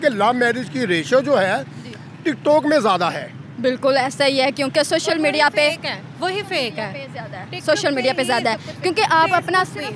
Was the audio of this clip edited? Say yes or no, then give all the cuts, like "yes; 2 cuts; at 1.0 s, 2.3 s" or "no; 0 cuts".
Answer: no; 0 cuts